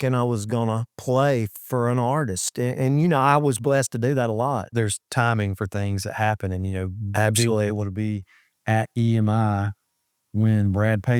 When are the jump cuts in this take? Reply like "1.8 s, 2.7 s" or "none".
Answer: 4.7 s